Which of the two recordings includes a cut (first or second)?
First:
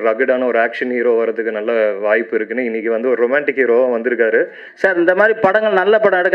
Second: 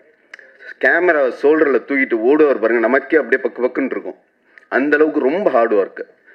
first